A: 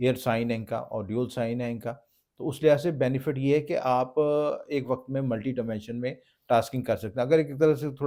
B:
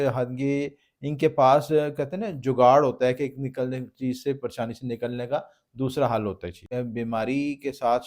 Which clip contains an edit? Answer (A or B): B